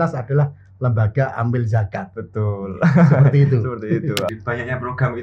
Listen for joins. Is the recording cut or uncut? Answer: cut